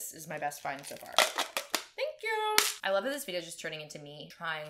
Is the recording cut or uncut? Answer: cut